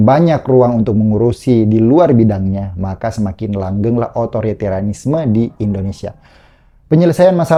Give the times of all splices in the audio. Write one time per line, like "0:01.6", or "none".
none